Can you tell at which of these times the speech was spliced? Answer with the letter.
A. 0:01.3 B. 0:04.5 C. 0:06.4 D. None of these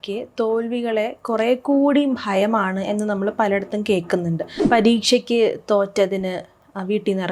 B